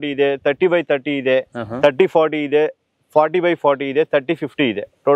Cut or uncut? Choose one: uncut